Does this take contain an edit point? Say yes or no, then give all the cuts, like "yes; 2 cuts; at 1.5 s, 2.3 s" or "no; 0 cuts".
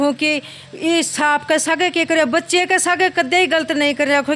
no; 0 cuts